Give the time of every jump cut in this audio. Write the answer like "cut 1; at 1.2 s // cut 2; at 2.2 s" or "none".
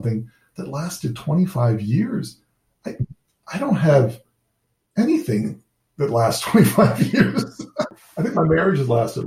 cut 1; at 8.0 s